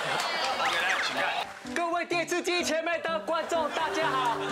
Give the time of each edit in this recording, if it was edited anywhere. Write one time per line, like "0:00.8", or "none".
0:01.4